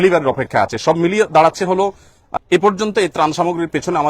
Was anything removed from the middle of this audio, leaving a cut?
yes; 1 cut; at 2.3 s

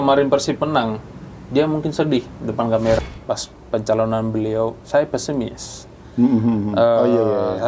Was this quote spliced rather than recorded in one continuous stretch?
yes; 1 cut; at 3.0 s

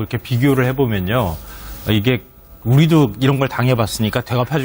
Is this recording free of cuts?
yes; 0 cuts

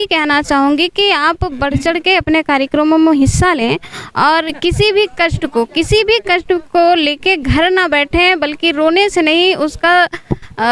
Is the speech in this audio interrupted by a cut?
no; 0 cuts

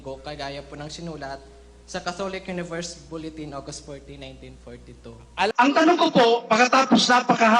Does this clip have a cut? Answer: yes; 1 cut; at 5.5 s

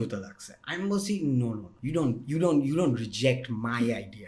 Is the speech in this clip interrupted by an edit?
yes; 1 cut; at 1.7 s

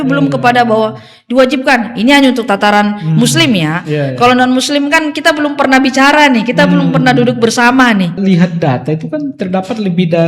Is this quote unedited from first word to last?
no; 1 cut; at 8.2 s

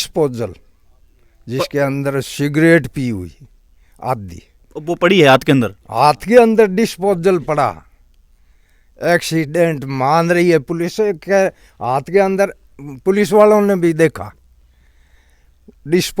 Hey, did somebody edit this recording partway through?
no; 0 cuts

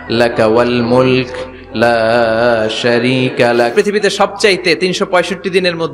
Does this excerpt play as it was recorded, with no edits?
no; 1 cut; at 3.7 s

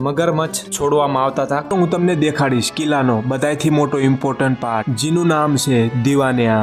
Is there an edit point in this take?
yes; 1 cut; at 1.7 s

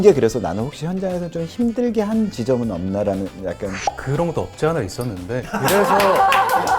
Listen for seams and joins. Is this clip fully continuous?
no; 1 cut; at 4.0 s

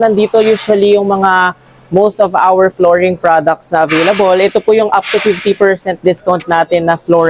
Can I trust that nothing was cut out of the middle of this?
yes; 0 cuts

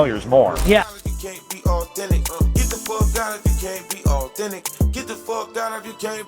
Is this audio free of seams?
no; 1 cut; at 0.9 s

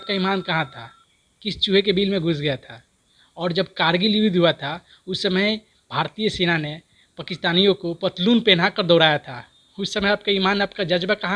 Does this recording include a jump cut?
no; 0 cuts

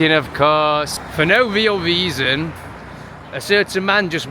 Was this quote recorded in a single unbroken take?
no; 1 cut; at 1.0 s

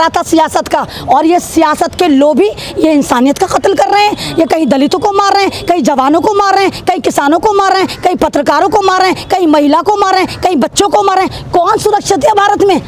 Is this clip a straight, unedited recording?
yes; 0 cuts

